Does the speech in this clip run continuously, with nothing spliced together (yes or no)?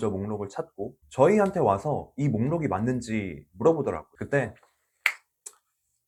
yes